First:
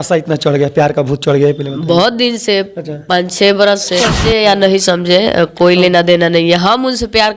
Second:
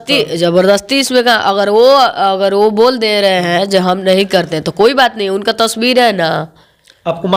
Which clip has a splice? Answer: first; 1 cut; at 4.2 s

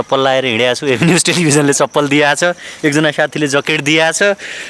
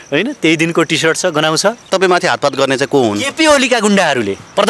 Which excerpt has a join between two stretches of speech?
second; 1 cut; at 1.9 s

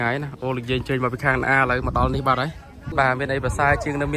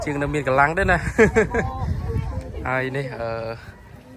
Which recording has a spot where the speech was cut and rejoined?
first; 1 cut; at 2.9 s

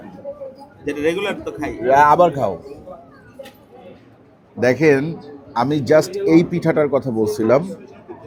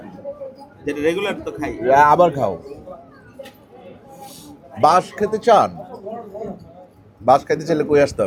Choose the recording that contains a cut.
first; 1 cut; at 4.0 s

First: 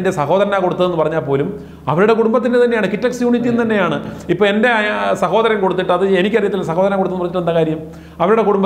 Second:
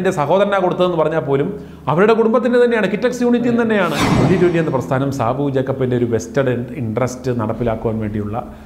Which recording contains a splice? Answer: second; 1 cut; at 4.0 s

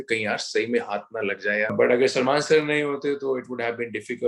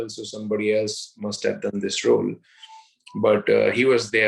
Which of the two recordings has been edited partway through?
first; 1 cut; at 1.7 s

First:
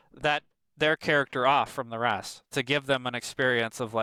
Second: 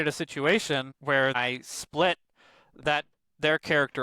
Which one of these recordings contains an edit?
second; 1 cut; at 1.4 s

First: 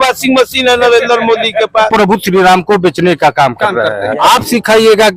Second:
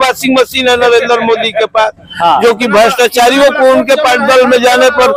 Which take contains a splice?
first; 2 cuts; at 1.9 s, 4.1 s

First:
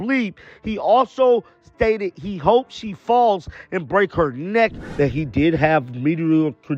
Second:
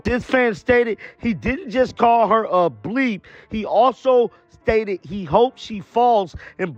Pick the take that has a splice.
first; 1 cut; at 4.8 s

